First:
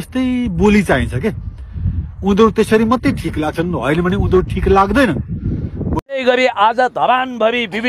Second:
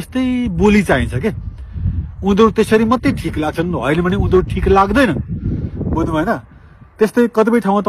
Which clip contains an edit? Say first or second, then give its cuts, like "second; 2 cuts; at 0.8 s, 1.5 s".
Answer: first; 1 cut; at 6.2 s